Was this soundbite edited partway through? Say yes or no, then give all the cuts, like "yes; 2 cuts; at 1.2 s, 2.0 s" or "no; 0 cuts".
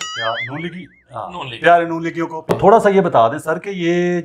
yes; 1 cut; at 2.5 s